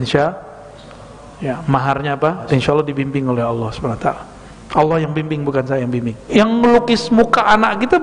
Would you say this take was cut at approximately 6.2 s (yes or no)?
yes